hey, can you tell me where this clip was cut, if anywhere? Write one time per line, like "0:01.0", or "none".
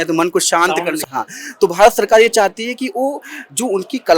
0:01.0